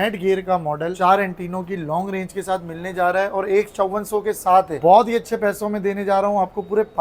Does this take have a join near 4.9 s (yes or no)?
no